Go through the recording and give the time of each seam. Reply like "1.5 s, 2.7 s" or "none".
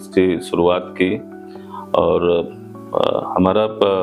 none

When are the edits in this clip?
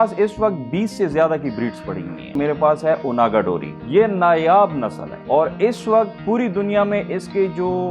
2.3 s

